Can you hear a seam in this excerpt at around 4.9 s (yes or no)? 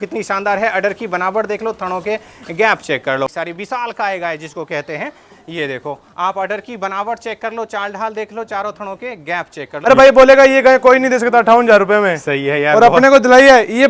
no